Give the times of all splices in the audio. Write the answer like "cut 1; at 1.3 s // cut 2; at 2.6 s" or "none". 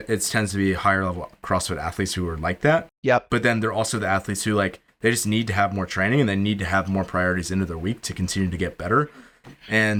none